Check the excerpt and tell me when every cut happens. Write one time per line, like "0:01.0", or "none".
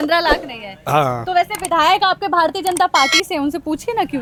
none